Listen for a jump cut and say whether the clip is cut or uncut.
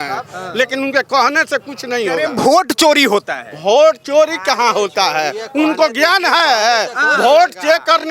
uncut